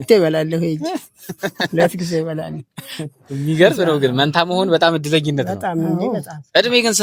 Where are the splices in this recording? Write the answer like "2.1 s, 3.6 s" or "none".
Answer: none